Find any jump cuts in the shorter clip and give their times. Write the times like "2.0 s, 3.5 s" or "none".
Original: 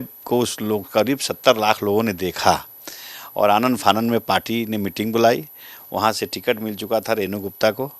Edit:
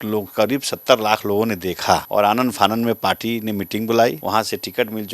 2.1 s, 4.2 s